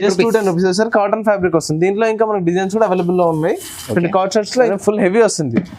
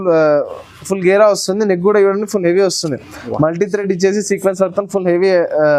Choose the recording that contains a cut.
first; 1 cut; at 4.7 s

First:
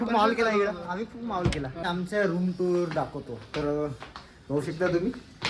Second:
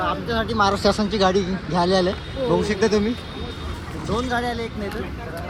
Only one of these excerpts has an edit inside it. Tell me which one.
first; 1 cut; at 1.8 s

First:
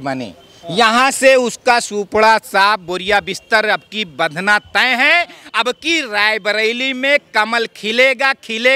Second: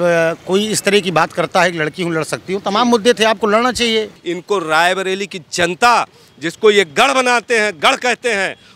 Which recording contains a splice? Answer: second; 1 cut; at 4.2 s

